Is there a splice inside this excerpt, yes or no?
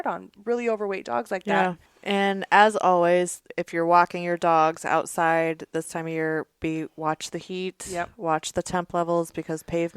yes